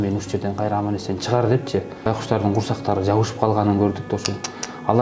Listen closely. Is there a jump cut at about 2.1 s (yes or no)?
yes